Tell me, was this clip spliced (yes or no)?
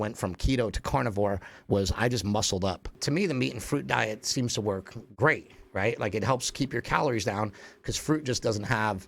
yes